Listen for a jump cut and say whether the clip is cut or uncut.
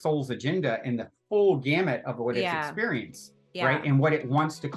uncut